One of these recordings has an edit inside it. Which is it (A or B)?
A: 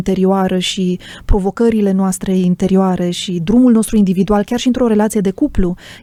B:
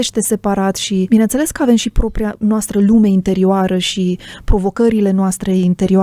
B